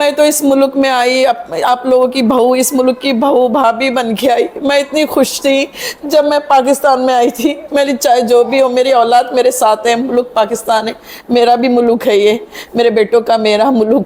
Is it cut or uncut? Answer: uncut